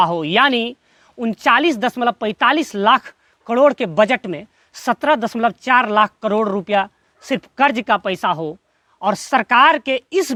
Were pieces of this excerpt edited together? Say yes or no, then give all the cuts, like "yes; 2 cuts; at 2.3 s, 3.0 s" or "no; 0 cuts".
no; 0 cuts